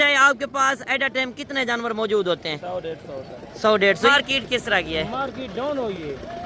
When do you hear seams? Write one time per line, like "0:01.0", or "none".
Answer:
0:04.1